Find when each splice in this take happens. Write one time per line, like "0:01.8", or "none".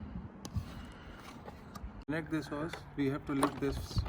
0:02.1